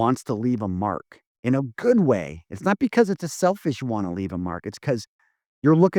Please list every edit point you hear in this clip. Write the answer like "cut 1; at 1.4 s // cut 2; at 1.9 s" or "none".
none